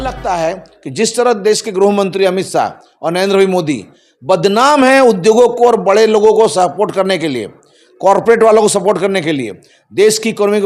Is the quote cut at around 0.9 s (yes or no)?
no